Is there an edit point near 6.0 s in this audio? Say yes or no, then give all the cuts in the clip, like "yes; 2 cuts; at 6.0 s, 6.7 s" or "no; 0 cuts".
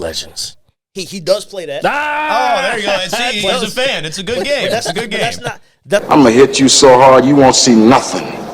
yes; 1 cut; at 6.0 s